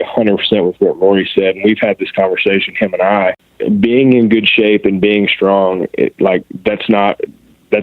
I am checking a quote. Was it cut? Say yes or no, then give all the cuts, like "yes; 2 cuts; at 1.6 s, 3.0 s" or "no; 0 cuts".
yes; 1 cut; at 3.5 s